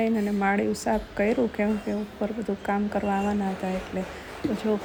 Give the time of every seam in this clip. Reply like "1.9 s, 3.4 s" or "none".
none